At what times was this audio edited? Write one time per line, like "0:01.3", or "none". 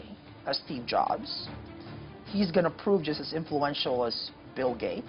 none